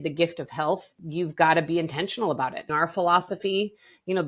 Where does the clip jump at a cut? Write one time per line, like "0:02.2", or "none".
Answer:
0:01.0
0:02.7